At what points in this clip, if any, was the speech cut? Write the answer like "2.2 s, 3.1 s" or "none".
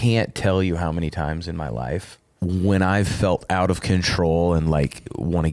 2.2 s